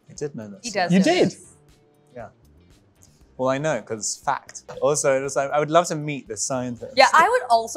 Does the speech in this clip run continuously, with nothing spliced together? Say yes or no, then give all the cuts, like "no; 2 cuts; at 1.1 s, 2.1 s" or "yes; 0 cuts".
no; 1 cut; at 4.7 s